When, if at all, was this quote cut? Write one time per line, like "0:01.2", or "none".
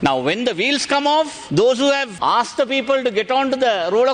0:01.4
0:02.1